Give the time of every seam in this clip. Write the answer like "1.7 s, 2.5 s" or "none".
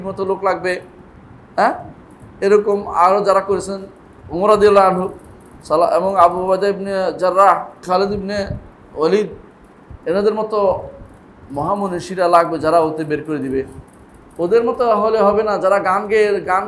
7.8 s